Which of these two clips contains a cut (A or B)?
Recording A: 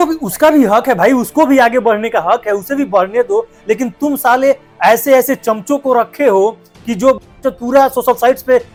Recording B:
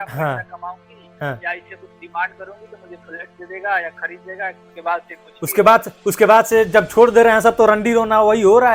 B